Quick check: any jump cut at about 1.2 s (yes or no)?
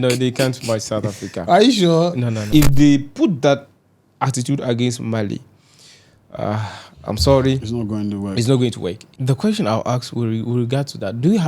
no